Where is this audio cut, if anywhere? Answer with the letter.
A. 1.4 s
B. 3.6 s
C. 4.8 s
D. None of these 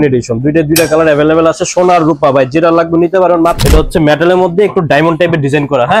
B